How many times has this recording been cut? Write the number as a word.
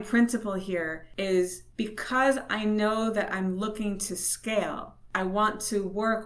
three